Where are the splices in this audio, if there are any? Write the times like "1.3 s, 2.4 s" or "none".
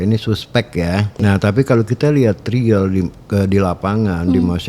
1.1 s